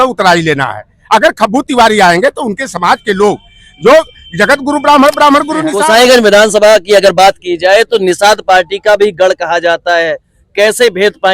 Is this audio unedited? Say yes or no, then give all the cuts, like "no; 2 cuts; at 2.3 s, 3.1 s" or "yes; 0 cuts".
no; 1 cut; at 5.7 s